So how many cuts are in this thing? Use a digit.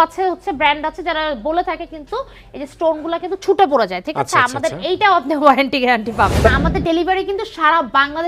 1